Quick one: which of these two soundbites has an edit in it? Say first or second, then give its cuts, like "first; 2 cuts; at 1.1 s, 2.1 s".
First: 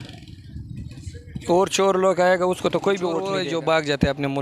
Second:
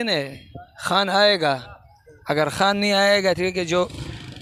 first; 1 cut; at 3.3 s